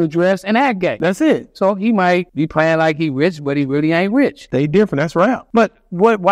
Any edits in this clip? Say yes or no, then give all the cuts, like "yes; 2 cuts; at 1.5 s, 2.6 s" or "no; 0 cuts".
yes; 4 cuts; at 1.0 s, 2.3 s, 4.4 s, 5.4 s